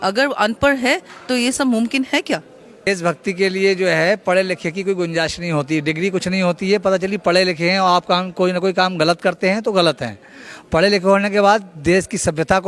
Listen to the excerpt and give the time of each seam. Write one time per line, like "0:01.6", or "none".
0:02.9